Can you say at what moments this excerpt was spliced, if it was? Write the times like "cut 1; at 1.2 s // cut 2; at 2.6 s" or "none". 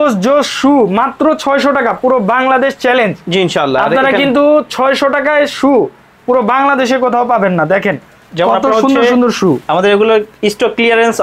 none